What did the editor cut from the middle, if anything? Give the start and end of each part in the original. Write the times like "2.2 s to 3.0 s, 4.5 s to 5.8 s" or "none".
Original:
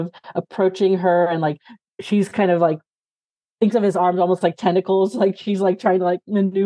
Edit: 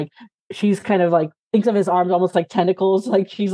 2.9 s to 3.4 s